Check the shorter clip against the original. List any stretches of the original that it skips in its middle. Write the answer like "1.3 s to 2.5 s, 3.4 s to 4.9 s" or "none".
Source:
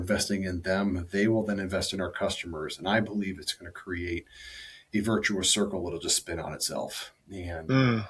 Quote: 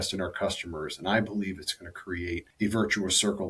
4.3 s to 4.8 s